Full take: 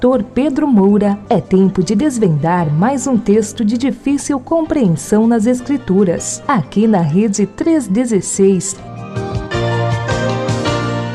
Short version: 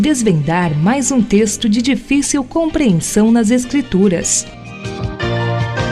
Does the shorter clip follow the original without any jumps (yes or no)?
no